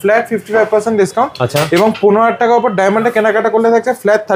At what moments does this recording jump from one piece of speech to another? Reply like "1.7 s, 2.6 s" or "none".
none